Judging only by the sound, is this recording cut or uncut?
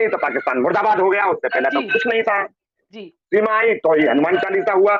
uncut